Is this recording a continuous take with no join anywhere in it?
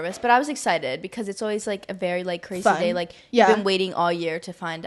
yes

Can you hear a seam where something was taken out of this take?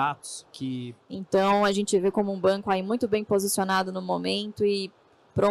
yes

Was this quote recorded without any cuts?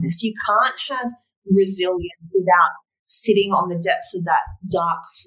yes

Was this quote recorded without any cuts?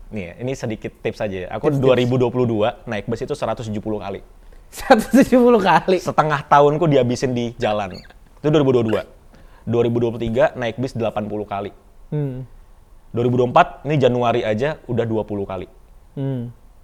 yes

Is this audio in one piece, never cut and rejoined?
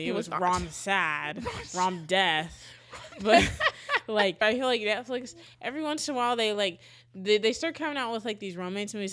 no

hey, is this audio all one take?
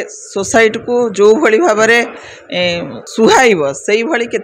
no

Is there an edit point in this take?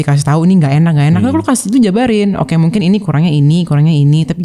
no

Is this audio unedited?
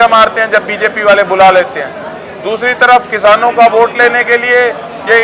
yes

